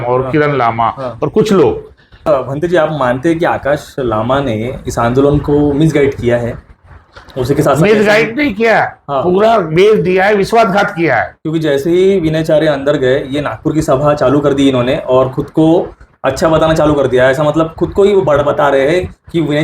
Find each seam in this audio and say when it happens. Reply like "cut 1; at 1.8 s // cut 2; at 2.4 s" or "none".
cut 1; at 2.3 s